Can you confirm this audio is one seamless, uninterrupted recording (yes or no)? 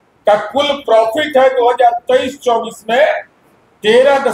yes